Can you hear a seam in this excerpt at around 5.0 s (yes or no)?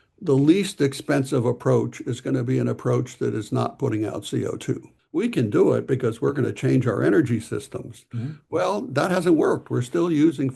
yes